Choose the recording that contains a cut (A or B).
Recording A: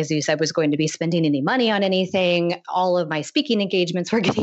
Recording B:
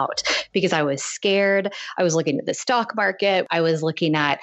B